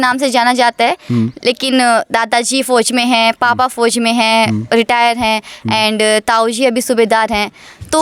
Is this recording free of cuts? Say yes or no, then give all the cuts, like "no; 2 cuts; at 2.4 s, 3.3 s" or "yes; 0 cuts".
yes; 0 cuts